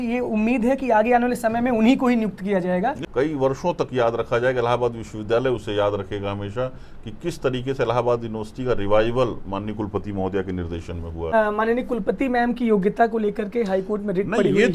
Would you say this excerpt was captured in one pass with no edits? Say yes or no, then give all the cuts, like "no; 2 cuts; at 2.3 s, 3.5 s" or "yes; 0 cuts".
no; 2 cuts; at 3.0 s, 11.3 s